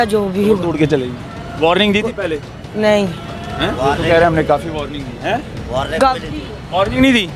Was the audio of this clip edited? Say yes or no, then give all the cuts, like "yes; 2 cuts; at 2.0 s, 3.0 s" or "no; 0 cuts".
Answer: no; 0 cuts